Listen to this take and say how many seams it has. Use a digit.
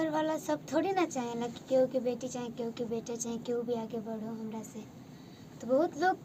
0